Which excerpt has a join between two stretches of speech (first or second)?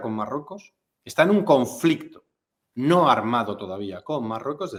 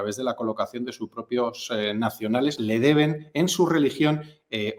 second